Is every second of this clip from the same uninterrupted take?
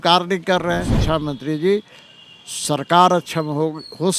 no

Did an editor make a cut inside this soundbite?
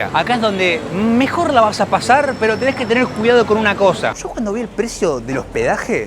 yes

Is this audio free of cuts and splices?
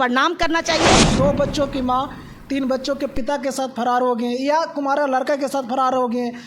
no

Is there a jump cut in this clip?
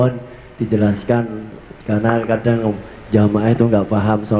no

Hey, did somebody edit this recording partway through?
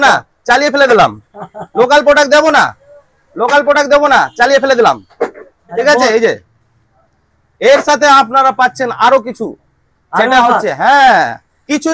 no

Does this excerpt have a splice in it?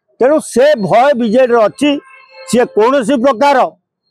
no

